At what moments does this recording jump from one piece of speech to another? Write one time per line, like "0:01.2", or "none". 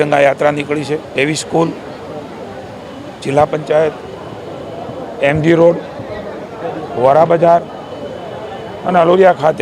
0:01.1